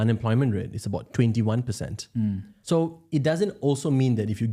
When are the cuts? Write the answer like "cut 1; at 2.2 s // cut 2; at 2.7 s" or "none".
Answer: cut 1; at 2.5 s

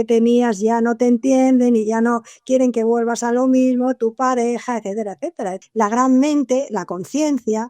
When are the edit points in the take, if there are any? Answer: cut 1; at 5.6 s

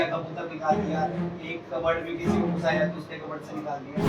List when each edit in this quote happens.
none

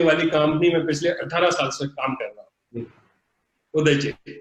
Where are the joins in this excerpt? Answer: none

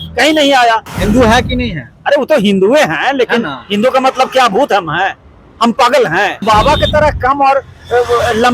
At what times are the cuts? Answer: cut 1; at 0.9 s // cut 2; at 6.4 s

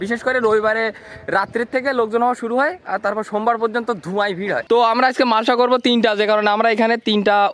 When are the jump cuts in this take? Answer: cut 1; at 4.6 s

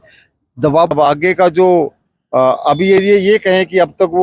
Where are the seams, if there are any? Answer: cut 1; at 0.9 s

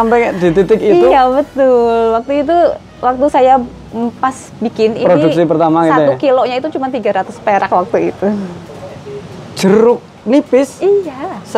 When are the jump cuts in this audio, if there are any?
none

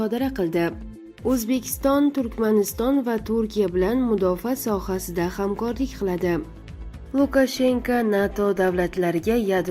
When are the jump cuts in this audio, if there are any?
cut 1; at 0.9 s // cut 2; at 6.8 s

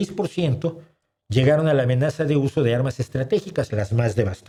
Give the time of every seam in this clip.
none

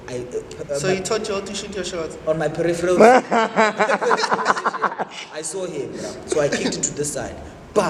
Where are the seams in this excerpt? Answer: none

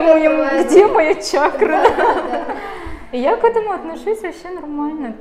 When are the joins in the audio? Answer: none

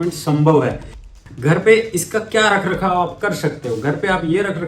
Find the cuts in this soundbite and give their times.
cut 1; at 1.0 s

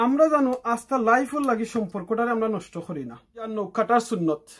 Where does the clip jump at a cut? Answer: cut 1; at 3.5 s

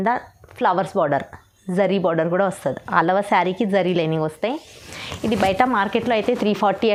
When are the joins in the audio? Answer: none

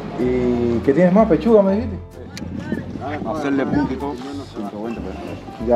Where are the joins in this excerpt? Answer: cut 1; at 2.4 s

